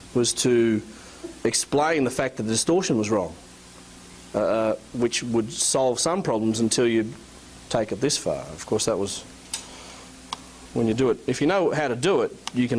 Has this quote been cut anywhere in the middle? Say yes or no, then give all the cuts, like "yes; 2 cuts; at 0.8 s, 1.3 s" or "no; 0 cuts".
yes; 1 cut; at 5.5 s